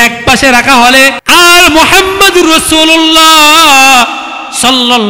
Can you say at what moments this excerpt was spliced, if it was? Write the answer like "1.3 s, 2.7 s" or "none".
1.2 s